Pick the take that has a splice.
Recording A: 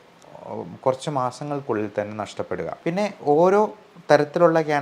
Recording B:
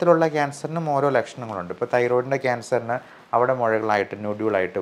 A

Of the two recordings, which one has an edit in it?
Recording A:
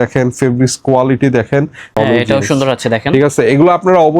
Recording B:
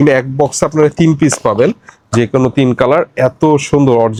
A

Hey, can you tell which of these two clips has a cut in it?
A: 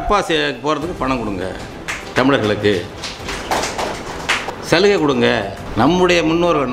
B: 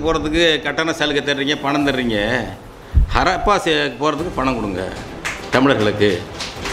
A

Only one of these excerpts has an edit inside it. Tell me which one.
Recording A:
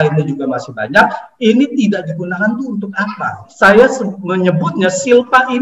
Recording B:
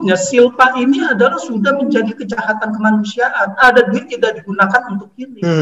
A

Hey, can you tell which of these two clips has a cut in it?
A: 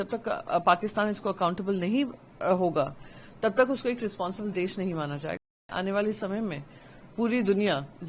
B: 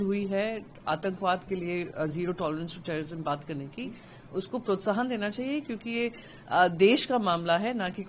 A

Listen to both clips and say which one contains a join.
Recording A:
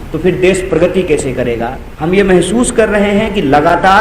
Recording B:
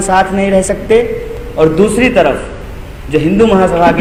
A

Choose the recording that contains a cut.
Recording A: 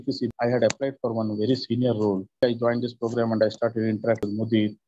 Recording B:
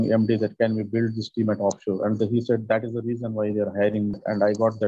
A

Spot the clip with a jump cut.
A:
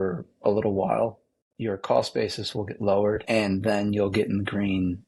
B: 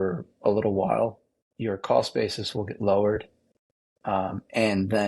A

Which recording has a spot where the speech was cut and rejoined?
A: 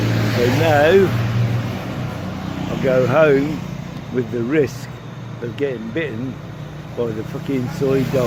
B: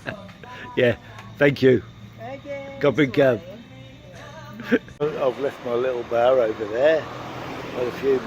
B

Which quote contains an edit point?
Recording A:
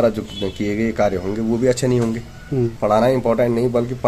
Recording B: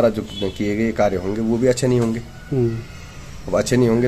A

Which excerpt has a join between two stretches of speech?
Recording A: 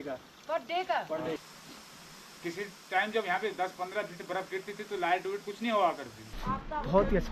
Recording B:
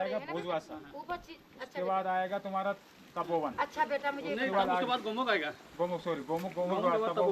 A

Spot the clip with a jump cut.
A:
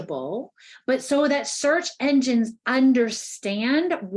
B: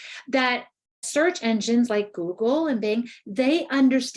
B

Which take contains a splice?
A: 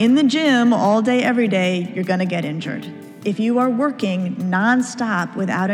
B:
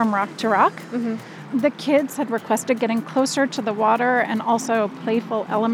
B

